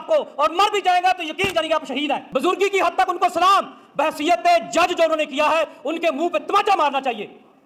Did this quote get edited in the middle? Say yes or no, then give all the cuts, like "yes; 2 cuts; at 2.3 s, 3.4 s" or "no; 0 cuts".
no; 0 cuts